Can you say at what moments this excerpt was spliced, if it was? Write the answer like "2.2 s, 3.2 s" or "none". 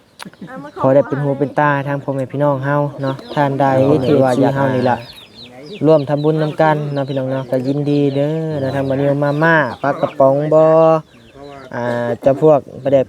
3.2 s